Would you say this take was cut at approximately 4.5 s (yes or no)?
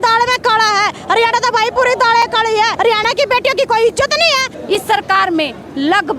yes